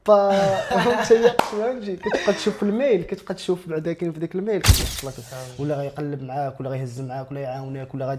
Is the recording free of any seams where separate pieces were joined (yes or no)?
no